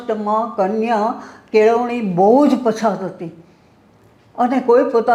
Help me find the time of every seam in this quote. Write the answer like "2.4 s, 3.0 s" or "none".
none

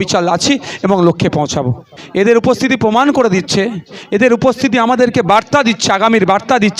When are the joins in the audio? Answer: 1.9 s

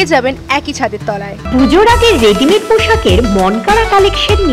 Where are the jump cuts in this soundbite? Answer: 1.4 s

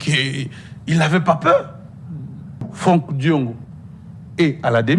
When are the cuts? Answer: 2.7 s

